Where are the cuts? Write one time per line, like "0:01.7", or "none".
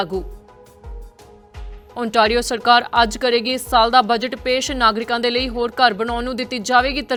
none